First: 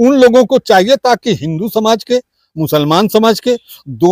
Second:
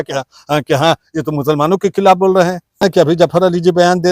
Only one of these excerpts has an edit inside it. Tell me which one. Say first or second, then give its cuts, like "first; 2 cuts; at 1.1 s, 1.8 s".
second; 1 cut; at 2.8 s